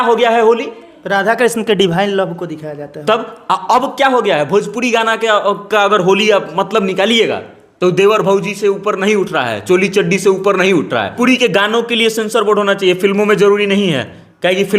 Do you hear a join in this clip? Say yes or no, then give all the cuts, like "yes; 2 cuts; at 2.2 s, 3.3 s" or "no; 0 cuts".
yes; 1 cut; at 11.1 s